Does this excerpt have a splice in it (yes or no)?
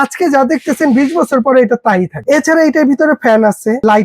yes